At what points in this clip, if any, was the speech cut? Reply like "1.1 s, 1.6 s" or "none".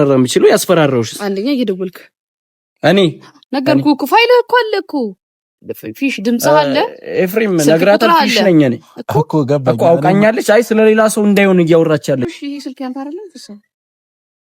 12.2 s